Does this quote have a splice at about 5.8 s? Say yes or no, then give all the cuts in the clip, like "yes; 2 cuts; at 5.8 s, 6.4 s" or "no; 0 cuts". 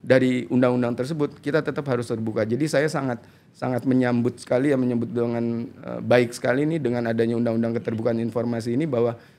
no; 0 cuts